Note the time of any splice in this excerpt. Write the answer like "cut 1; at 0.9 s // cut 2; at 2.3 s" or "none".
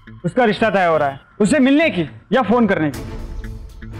none